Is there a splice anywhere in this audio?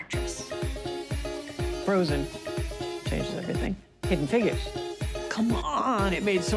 yes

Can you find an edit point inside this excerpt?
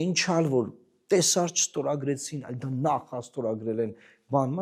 no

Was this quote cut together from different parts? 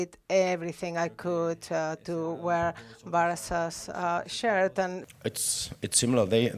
yes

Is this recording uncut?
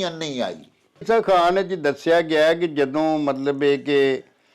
no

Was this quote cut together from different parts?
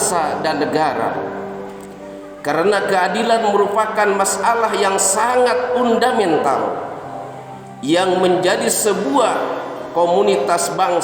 no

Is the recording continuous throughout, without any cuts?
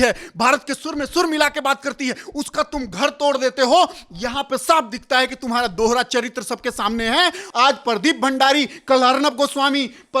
no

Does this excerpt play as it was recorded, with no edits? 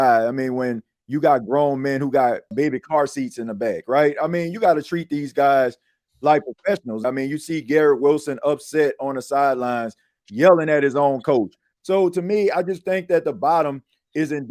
no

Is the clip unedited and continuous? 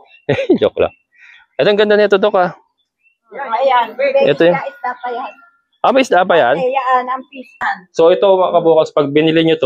no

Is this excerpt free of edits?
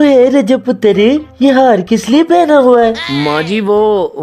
yes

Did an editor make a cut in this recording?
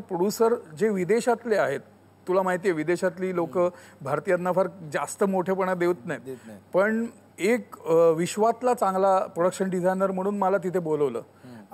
yes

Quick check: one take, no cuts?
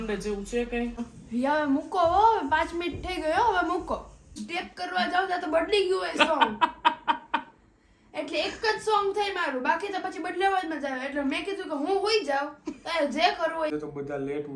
no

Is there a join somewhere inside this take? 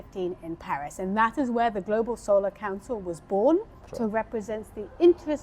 yes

